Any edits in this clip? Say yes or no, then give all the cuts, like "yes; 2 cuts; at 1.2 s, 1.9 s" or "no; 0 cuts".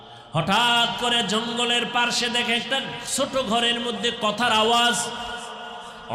no; 0 cuts